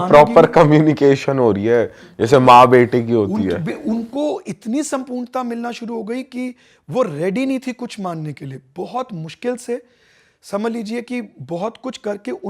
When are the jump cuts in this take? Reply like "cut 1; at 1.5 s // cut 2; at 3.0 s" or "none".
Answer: none